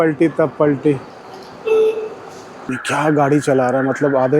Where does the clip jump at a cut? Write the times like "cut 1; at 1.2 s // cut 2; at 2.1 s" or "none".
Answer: cut 1; at 2.7 s